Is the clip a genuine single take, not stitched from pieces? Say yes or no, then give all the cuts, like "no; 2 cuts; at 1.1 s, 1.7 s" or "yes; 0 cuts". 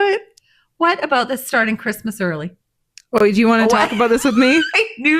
yes; 0 cuts